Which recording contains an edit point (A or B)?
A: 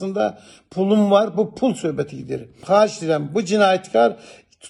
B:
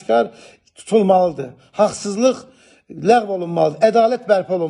A